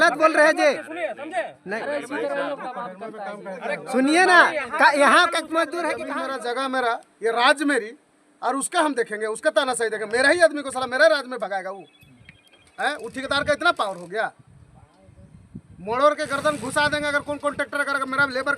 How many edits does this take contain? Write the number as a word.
one